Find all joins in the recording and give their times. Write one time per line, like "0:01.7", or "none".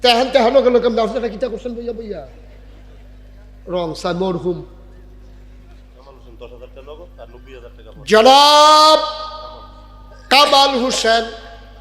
0:06.0